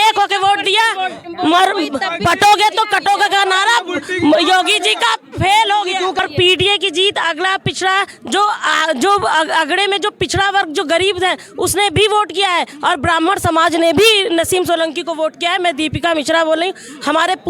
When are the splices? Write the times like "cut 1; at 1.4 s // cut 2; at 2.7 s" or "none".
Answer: cut 1; at 6.2 s